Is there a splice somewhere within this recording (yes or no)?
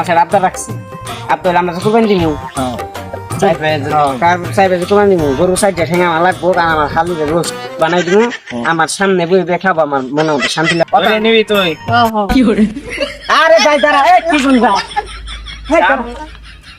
yes